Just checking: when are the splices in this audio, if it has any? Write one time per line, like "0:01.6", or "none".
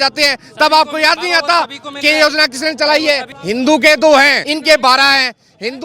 0:03.3
0:04.4